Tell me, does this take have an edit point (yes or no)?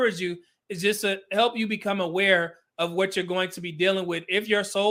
no